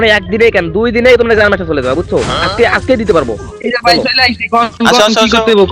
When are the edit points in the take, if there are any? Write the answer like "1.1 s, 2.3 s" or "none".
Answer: 4.7 s